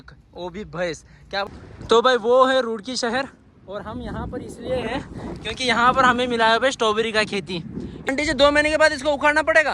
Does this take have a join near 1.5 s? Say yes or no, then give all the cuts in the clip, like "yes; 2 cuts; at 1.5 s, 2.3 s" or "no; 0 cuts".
yes; 2 cuts; at 1.5 s, 8.1 s